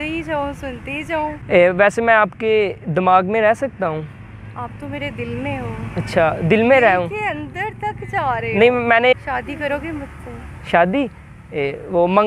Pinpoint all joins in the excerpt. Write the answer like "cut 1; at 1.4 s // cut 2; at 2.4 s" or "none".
cut 1; at 1.4 s // cut 2; at 9.1 s